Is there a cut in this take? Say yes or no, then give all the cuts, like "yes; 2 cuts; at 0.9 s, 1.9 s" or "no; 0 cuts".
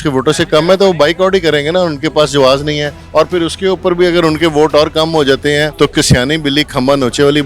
yes; 2 cuts; at 2.9 s, 5.7 s